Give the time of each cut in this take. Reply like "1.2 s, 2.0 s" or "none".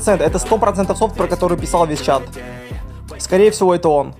none